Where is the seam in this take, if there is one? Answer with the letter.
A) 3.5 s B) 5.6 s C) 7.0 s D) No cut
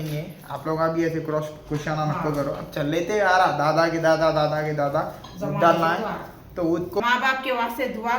C